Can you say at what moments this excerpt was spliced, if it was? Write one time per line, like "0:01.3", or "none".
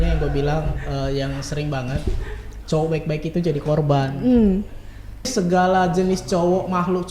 0:05.3